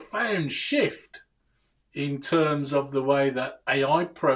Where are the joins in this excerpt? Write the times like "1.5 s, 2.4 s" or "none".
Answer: none